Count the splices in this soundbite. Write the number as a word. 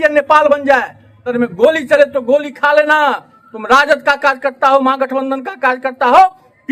one